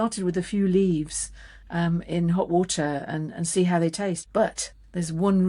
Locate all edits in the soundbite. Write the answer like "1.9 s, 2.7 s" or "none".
4.2 s

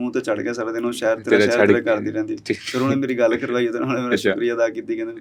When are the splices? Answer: none

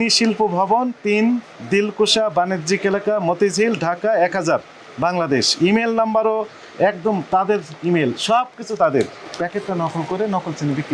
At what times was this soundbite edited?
9.2 s

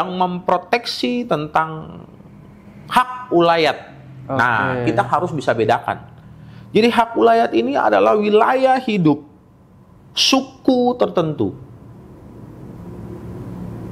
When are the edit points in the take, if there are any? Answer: none

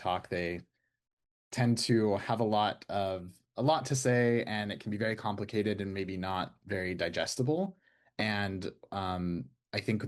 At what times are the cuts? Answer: none

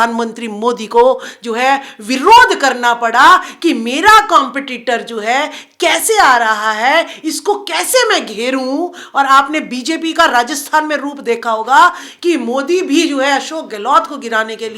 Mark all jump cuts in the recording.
none

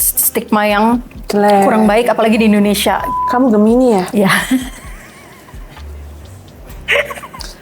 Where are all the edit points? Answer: 3.1 s

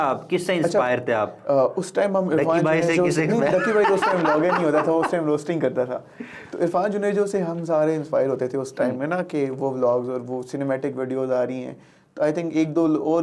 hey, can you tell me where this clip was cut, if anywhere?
none

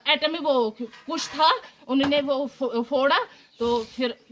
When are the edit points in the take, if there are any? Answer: none

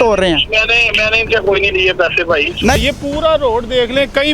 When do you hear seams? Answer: 2.7 s

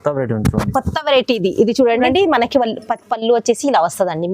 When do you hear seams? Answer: 2.0 s

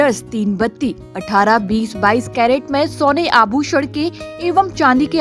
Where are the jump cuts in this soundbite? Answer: none

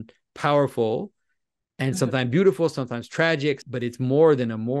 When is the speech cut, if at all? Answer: 3.6 s

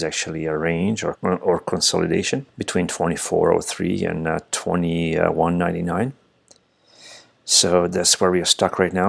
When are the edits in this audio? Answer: 1.2 s, 2.5 s

